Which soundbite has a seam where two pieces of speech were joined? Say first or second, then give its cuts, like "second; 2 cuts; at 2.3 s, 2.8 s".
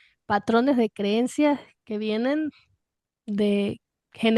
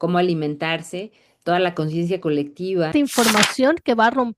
second; 1 cut; at 2.9 s